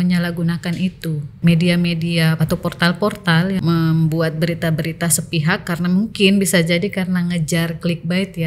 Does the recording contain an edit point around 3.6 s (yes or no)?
yes